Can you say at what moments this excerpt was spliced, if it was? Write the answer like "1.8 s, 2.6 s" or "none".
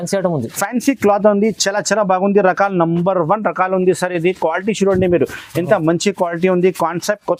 none